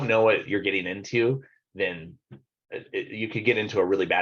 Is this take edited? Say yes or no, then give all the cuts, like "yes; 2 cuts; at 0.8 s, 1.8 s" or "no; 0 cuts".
no; 0 cuts